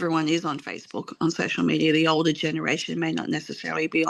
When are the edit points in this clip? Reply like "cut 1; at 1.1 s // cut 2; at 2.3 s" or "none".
none

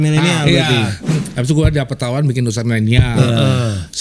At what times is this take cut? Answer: none

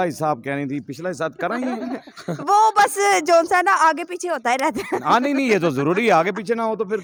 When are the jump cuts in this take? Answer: none

